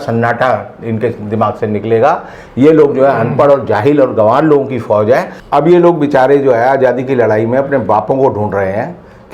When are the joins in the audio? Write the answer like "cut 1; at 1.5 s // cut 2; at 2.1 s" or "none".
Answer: cut 1; at 5.4 s